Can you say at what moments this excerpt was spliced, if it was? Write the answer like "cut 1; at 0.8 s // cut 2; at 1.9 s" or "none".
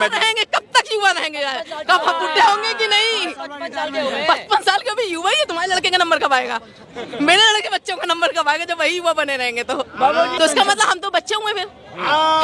cut 1; at 10.4 s